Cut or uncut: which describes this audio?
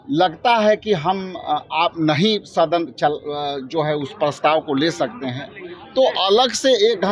uncut